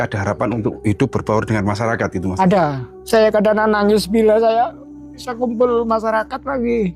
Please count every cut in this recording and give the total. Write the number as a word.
one